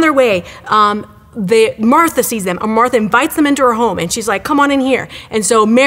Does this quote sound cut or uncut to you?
uncut